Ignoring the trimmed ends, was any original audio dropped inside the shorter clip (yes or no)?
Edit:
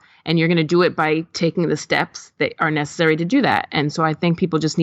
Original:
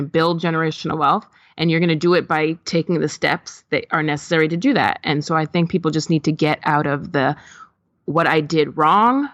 no